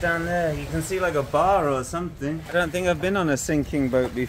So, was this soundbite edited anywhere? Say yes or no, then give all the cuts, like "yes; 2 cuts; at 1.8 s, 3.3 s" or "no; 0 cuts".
yes; 1 cut; at 2.4 s